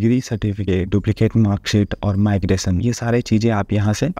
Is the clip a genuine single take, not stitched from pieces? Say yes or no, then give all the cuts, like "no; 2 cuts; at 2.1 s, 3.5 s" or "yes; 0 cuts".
yes; 0 cuts